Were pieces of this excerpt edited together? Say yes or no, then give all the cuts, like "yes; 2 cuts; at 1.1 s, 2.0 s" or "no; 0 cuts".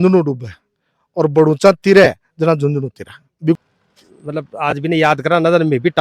yes; 1 cut; at 3.6 s